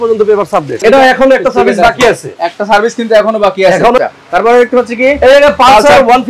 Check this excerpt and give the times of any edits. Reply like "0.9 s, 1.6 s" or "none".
0.8 s, 4.0 s